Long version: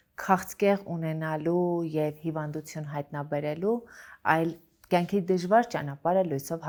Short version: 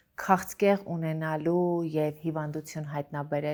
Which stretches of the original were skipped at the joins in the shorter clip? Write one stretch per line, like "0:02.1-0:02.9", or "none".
none